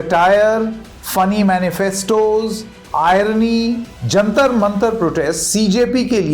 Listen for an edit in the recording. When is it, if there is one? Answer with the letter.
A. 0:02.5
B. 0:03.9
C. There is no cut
B